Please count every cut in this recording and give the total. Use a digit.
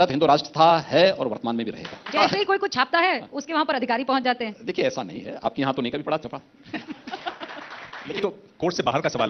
2